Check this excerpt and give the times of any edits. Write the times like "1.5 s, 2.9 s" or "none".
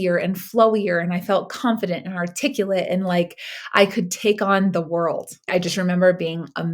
5.3 s